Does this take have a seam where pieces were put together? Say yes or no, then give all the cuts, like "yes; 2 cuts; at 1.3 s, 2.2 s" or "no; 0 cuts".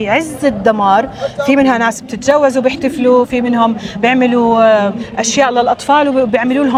no; 0 cuts